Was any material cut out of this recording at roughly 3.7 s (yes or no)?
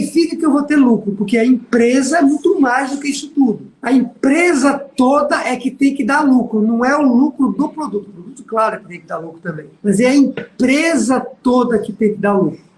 yes